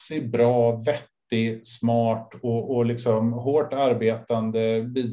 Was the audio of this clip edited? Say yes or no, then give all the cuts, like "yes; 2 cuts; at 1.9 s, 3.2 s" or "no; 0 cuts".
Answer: no; 0 cuts